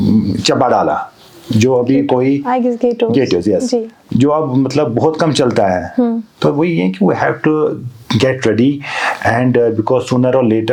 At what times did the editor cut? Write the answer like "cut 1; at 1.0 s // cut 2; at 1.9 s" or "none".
none